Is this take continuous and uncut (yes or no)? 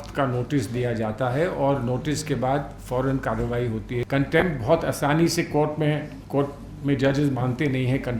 no